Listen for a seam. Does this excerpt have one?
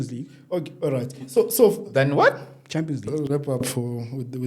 yes; 1 cut; at 3.1 s

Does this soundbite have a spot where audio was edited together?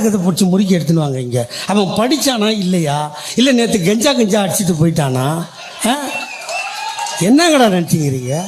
no; 0 cuts

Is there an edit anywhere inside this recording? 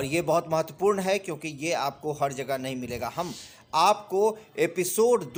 no; 0 cuts

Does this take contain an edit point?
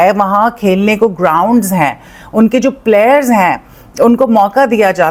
no; 0 cuts

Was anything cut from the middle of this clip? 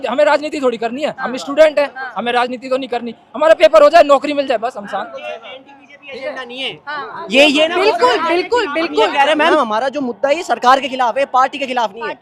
yes; 1 cut; at 9.5 s

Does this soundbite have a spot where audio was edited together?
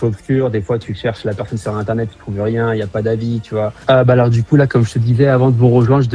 yes; 1 cut; at 3.8 s

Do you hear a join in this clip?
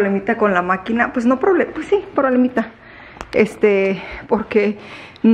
no; 0 cuts

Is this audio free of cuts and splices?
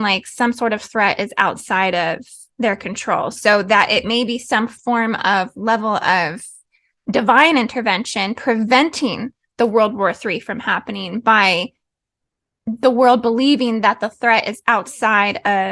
no; 1 cut; at 4.7 s

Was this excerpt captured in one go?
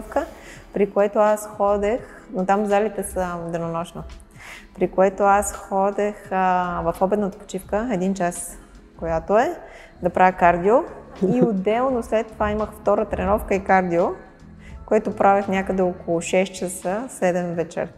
no; 1 cut; at 11.1 s

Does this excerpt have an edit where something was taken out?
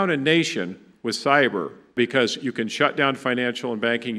yes; 1 cut; at 1.9 s

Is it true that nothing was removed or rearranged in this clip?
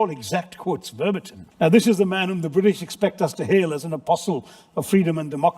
no; 1 cut; at 1.4 s

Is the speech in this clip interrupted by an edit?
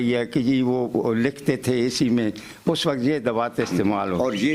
no; 0 cuts

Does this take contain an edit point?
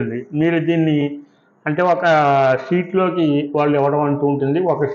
no; 0 cuts

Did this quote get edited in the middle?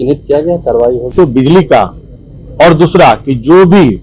yes; 1 cut; at 1.1 s

